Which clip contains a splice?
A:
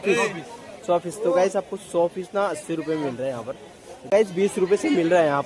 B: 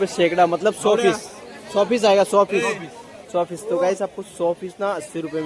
A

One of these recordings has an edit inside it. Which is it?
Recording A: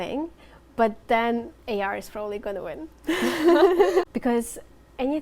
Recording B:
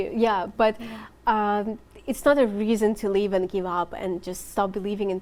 A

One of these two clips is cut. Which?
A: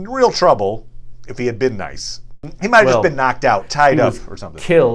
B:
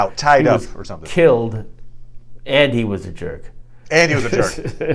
A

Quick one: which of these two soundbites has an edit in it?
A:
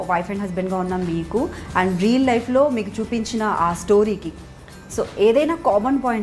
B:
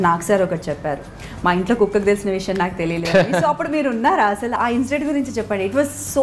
B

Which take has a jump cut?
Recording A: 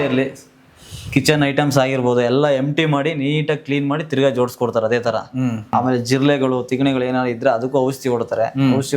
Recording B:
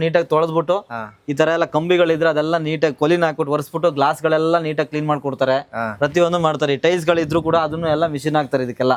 A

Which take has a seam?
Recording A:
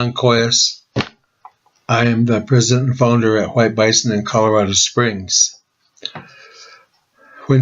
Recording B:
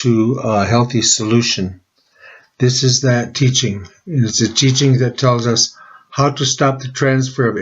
B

